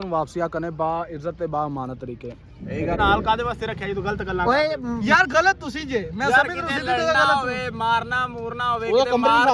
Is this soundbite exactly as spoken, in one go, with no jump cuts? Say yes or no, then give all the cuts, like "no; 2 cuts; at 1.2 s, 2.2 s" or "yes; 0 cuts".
no; 1 cut; at 3.0 s